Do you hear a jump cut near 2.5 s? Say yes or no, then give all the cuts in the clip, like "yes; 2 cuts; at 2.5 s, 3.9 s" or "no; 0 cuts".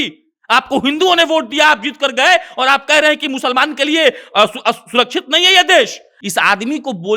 no; 1 cut; at 6.1 s